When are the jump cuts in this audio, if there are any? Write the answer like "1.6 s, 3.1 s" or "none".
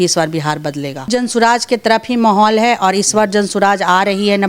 1.1 s